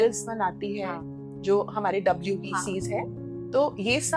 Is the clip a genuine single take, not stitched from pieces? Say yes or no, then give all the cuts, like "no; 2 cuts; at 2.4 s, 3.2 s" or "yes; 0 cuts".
yes; 0 cuts